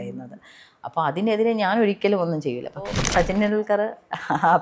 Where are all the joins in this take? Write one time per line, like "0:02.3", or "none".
0:03.0